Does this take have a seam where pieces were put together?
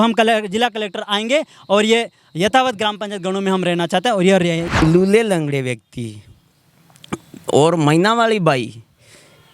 yes; 1 cut; at 4.6 s

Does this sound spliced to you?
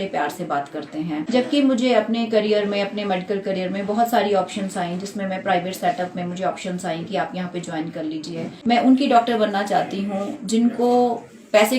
yes; 2 cuts; at 1.3 s, 8.5 s

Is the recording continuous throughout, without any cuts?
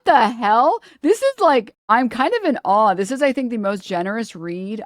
no; 1 cut; at 1.8 s

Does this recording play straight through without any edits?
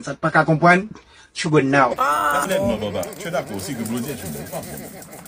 no; 1 cut; at 2.0 s

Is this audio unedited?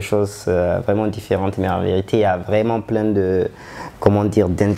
yes; 0 cuts

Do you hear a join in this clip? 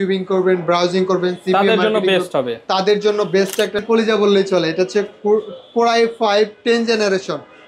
yes; 1 cut; at 3.8 s

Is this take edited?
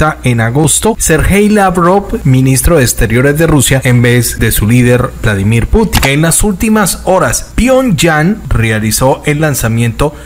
yes; 6 cuts; at 1.0 s, 2.2 s, 4.1 s, 5.9 s, 7.4 s, 8.5 s

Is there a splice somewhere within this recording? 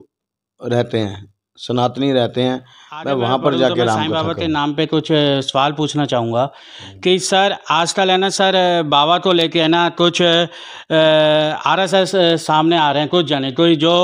yes; 1 cut; at 4.0 s

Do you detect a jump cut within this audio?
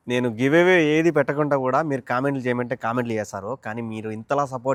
no; 0 cuts

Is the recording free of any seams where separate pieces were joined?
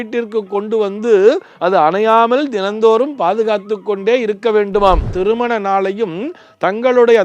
no; 1 cut; at 5.1 s

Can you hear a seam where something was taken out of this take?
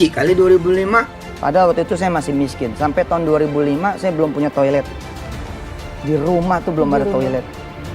yes; 1 cut; at 1.3 s

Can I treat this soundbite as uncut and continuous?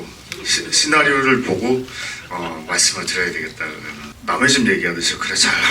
no; 1 cut; at 4.1 s

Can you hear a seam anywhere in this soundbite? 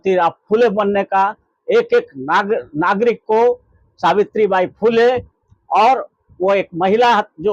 no; 0 cuts

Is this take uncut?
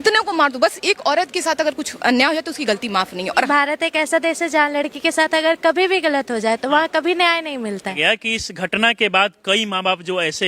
no; 2 cuts; at 3.5 s, 7.9 s

